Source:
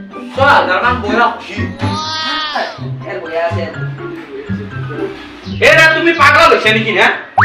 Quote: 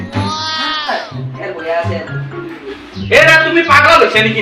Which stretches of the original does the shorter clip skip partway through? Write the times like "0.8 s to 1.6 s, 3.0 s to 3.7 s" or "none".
4.4 s to 5.2 s